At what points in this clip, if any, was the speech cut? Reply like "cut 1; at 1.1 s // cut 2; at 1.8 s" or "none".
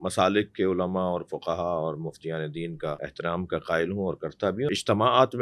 cut 1; at 3.1 s // cut 2; at 4.7 s